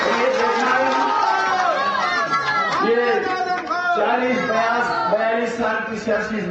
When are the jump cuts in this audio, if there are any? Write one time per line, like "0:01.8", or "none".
0:02.1